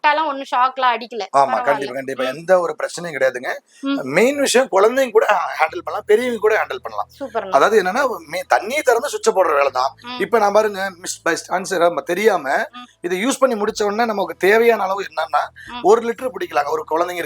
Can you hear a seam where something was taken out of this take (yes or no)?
no